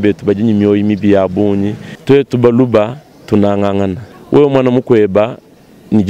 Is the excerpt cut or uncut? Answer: cut